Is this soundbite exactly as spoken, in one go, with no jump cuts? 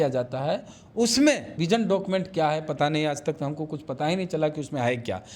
no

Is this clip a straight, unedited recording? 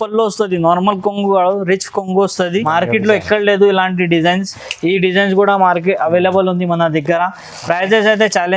no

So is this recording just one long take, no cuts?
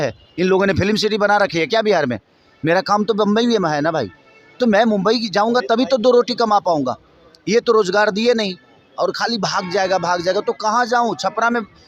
yes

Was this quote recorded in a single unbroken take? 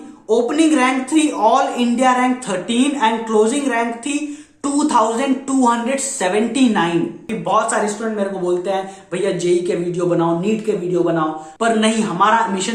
no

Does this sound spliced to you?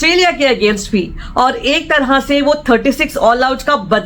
no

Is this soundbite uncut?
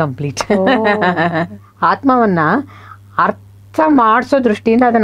no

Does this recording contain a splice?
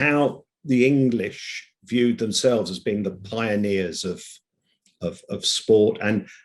no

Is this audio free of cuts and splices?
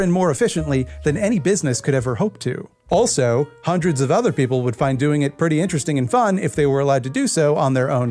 yes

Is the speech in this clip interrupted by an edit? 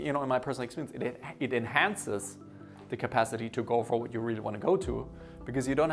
no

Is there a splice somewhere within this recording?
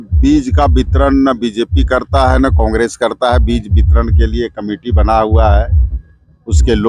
no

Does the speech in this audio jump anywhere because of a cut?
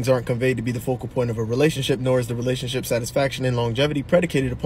no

